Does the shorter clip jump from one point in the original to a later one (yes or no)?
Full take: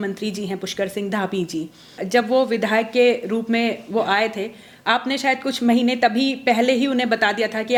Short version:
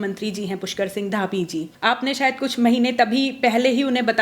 yes